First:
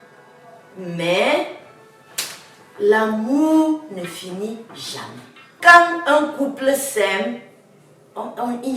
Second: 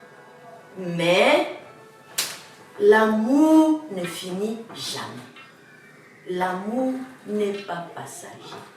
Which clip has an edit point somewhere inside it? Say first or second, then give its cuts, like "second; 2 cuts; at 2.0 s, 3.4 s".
first; 1 cut; at 5.5 s